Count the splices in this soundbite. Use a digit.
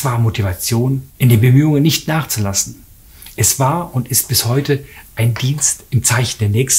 1